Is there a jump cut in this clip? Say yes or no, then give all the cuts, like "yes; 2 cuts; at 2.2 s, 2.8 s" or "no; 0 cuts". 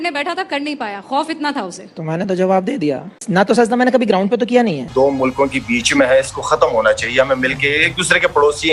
yes; 1 cut; at 4.9 s